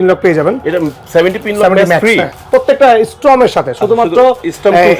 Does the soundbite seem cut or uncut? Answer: uncut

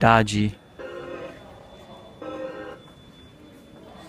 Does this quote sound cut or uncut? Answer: cut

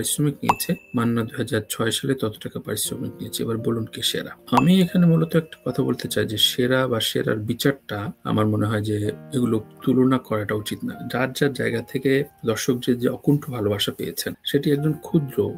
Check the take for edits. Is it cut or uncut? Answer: uncut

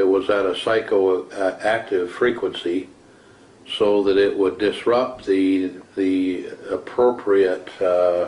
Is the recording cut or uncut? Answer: cut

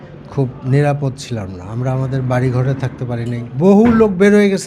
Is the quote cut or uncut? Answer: cut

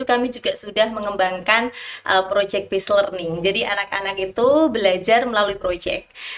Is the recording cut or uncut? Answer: uncut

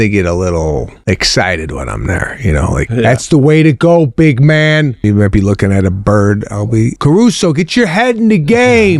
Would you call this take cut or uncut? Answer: cut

